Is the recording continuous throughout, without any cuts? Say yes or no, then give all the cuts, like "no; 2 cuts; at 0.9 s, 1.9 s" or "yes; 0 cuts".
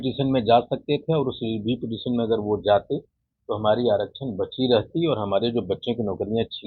yes; 0 cuts